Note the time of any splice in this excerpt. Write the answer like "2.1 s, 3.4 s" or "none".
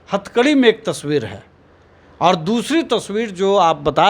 none